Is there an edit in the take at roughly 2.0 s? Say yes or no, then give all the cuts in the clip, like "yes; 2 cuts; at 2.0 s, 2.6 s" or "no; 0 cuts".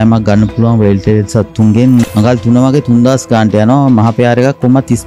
yes; 1 cut; at 2.0 s